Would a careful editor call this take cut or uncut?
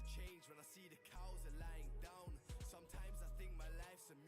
cut